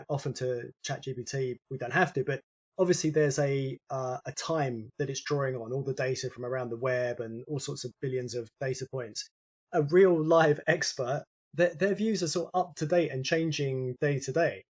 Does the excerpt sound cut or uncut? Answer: cut